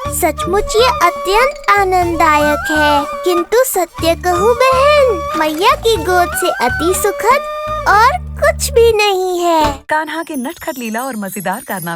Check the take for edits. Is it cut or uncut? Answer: cut